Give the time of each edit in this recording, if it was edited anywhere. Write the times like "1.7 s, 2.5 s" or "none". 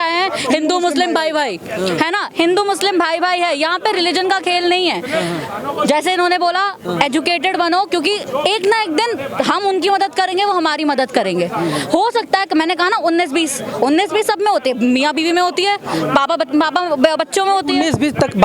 none